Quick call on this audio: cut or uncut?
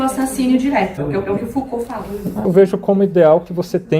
cut